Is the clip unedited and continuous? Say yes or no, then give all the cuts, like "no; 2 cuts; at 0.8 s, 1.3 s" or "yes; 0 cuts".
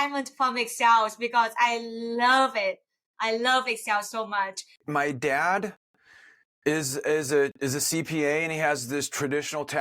no; 1 cut; at 4.8 s